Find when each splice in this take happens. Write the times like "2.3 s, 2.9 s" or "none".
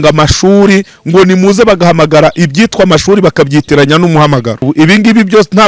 4.6 s